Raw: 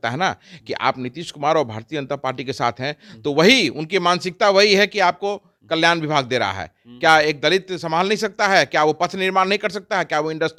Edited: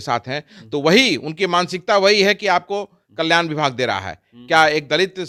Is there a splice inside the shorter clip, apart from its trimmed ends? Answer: no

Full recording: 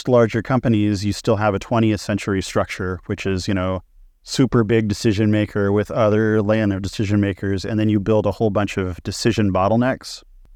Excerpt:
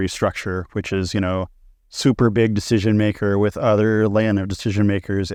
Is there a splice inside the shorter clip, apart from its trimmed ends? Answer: no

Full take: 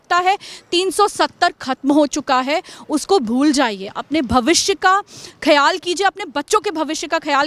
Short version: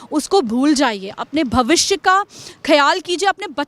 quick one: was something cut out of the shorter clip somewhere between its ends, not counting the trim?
no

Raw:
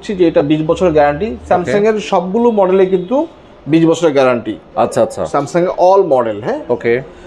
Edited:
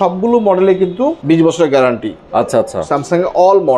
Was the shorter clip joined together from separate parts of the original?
yes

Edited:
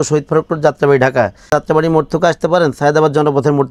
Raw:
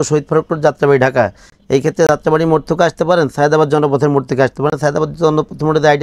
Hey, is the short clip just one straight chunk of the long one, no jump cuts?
no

